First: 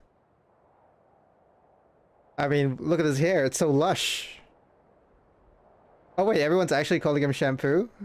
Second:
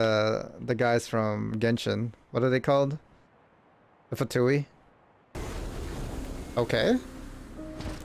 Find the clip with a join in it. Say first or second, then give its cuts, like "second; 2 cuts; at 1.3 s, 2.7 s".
second; 1 cut; at 5.3 s